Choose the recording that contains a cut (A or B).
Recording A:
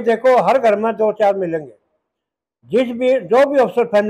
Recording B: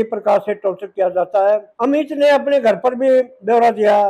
B